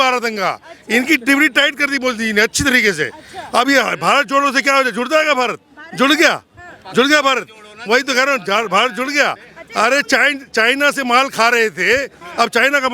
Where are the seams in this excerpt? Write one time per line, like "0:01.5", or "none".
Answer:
none